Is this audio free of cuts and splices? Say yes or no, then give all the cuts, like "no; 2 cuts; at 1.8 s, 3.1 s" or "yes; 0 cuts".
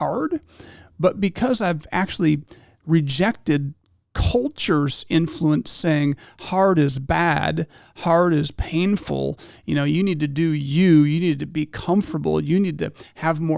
yes; 0 cuts